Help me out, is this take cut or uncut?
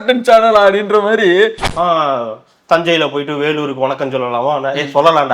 cut